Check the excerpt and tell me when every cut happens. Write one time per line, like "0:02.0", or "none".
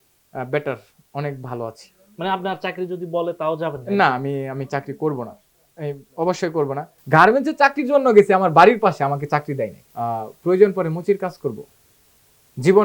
0:07.0
0:09.8